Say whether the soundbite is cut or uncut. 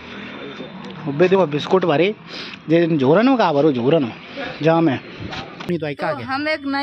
cut